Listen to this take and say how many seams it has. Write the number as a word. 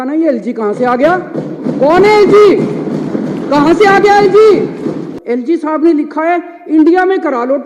one